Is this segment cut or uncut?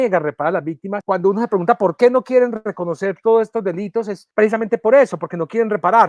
cut